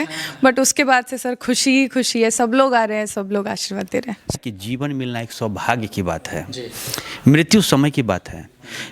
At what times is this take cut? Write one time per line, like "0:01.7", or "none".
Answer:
0:04.4